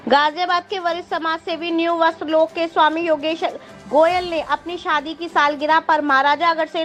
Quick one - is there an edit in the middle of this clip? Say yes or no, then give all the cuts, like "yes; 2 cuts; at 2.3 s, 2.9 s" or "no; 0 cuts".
no; 0 cuts